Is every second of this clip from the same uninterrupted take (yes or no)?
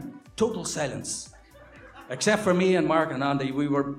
yes